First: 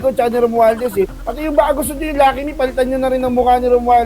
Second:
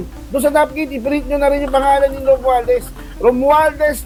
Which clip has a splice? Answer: first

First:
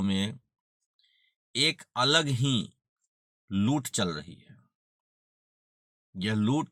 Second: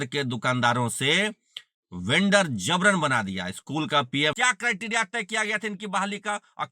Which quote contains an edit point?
second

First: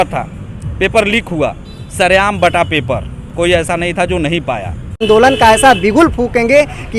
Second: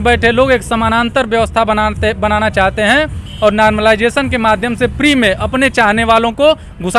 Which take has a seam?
first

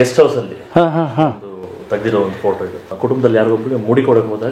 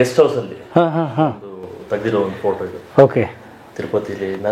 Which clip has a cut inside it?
first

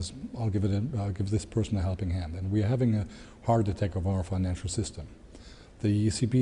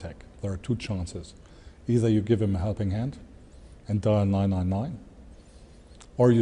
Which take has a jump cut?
second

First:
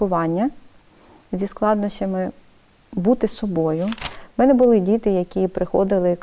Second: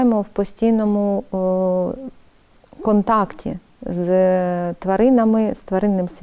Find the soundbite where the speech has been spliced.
first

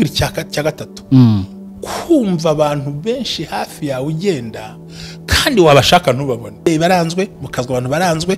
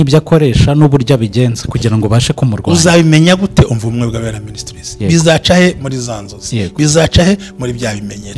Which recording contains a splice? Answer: first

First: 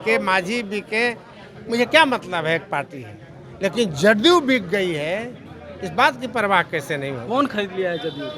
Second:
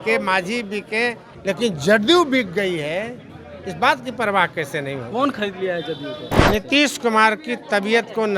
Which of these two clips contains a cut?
second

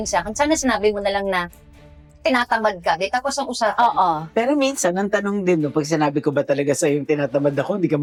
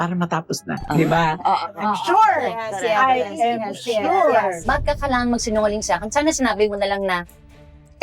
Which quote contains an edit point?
second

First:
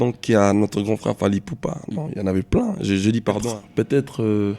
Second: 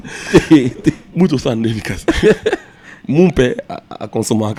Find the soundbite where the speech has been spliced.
first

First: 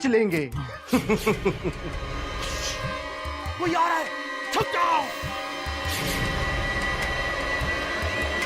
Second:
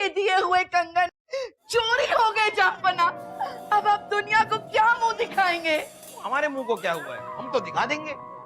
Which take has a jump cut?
second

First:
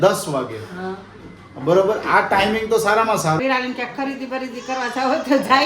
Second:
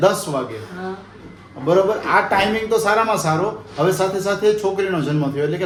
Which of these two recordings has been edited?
first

